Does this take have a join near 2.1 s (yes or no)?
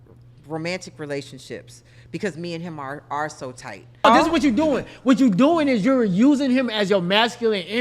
no